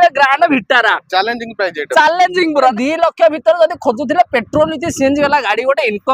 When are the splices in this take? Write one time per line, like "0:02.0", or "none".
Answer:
0:02.7